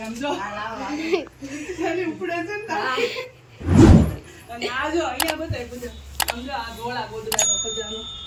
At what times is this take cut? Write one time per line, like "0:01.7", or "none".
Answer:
none